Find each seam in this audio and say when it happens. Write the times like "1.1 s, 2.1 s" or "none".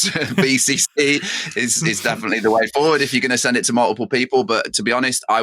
none